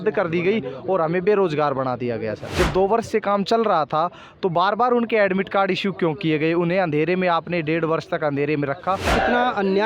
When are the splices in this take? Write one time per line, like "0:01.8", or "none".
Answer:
0:02.4
0:09.1